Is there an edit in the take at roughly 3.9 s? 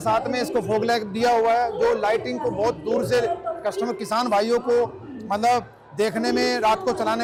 no; 0 cuts

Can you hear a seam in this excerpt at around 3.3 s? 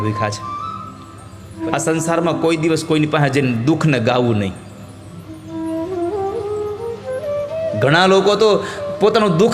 no; 1 cut; at 1.6 s

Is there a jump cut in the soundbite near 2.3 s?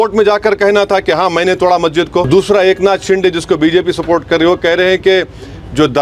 yes; 1 cut; at 2.3 s

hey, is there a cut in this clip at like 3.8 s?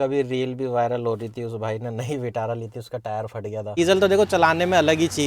yes; 1 cut; at 3.8 s

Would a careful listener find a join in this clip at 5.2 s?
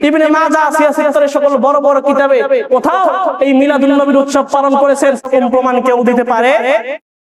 yes; 1 cut; at 5.2 s

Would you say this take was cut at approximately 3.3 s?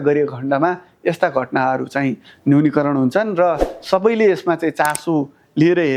no; 0 cuts

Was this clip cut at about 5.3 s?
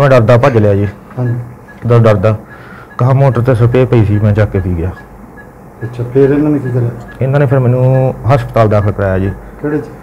no; 0 cuts

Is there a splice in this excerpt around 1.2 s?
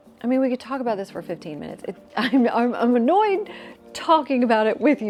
no; 0 cuts

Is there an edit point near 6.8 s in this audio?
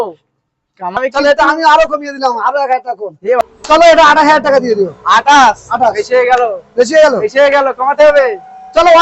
no; 2 cuts; at 1.0 s, 3.5 s

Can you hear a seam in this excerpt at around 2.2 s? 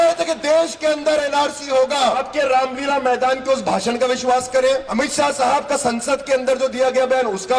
yes; 2 cuts; at 2.2 s, 4.9 s

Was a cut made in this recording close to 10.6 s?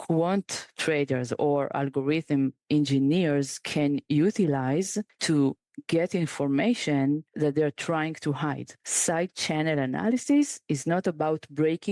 no; 3 cuts; at 5.1 s, 7.4 s, 8.7 s

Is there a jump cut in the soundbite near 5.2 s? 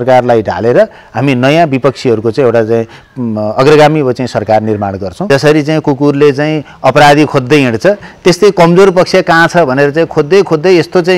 yes; 1 cut; at 5.2 s

